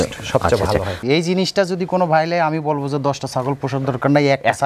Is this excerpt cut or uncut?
cut